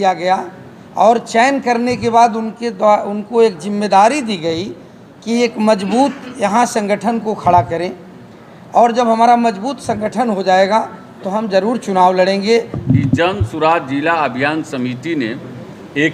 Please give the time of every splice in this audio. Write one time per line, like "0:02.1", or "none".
0:12.7

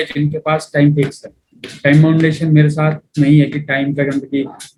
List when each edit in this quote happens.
none

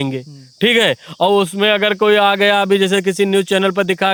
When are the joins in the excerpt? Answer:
none

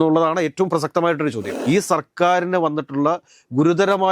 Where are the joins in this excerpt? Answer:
0:01.5

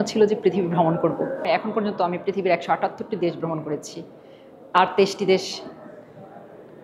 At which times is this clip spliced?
0:01.4

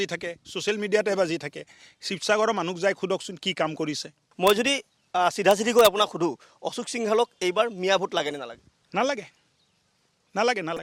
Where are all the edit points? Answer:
0:04.2

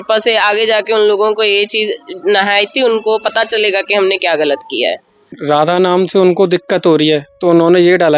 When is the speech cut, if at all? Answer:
0:05.3

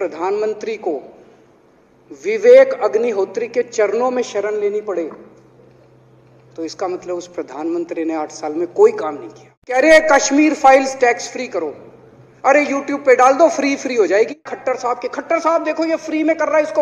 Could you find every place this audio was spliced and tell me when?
0:09.8
0:14.5

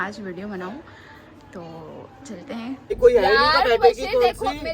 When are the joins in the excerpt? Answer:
0:02.9

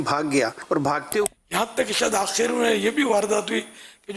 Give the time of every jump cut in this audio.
0:01.2

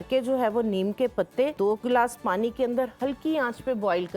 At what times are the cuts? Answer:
0:01.6

